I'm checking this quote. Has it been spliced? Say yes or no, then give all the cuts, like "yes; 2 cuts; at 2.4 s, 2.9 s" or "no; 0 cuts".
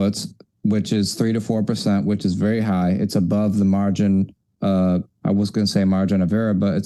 no; 0 cuts